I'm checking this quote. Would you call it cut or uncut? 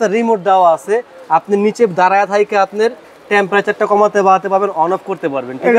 uncut